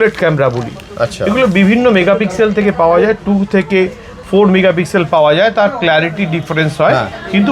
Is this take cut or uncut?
uncut